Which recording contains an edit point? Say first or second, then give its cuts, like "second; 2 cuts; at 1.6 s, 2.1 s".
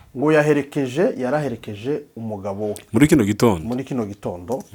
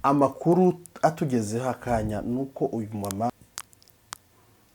second; 1 cut; at 3.3 s